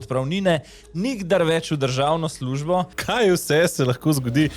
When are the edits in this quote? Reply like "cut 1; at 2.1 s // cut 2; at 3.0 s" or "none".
cut 1; at 3.0 s